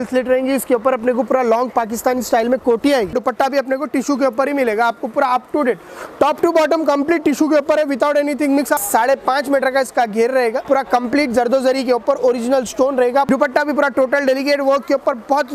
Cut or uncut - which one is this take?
cut